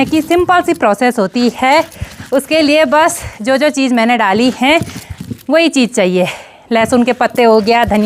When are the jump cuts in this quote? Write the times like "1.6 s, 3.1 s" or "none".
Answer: none